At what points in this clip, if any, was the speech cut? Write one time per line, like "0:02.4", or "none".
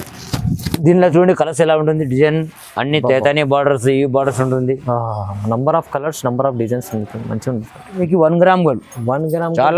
0:08.0